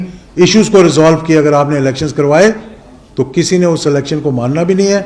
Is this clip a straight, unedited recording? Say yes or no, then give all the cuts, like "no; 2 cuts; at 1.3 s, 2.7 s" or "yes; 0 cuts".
yes; 0 cuts